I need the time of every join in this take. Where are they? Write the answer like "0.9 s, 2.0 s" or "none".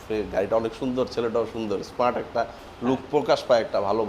none